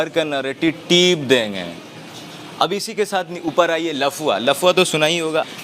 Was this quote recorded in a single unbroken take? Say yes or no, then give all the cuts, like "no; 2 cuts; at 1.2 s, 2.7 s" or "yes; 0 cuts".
yes; 0 cuts